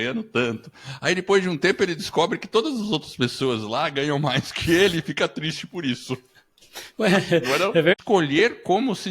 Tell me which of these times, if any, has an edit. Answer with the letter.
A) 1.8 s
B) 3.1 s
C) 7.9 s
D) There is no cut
C